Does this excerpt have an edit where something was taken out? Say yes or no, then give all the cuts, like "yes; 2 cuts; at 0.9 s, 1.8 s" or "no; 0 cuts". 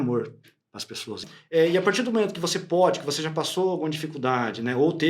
yes; 1 cut; at 1.2 s